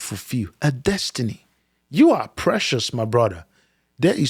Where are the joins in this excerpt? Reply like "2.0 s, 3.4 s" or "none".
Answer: none